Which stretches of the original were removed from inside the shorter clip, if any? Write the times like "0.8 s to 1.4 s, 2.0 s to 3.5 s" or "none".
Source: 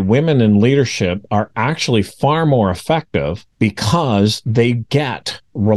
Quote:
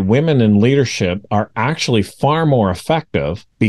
none